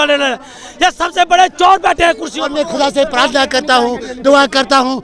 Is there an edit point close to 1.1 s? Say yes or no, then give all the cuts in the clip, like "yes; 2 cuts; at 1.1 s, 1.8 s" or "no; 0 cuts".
no; 1 cut; at 2.3 s